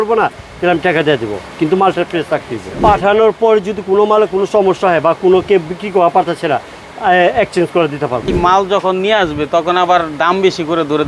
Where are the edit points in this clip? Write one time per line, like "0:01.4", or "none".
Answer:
0:02.8
0:08.3